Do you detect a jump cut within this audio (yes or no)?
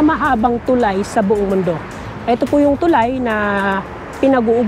no